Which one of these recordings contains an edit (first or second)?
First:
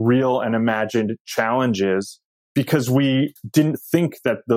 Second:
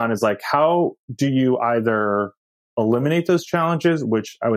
first